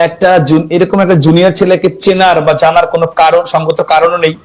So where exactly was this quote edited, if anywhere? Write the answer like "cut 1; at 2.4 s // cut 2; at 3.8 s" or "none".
none